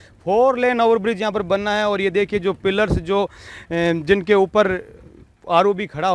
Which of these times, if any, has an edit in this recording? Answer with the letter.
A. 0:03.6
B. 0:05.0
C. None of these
C